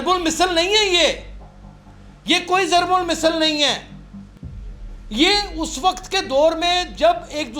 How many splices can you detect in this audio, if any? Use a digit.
0